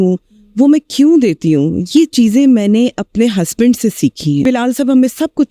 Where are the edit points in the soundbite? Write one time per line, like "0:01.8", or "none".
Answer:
0:04.4